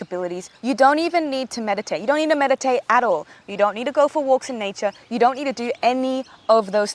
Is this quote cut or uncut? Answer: uncut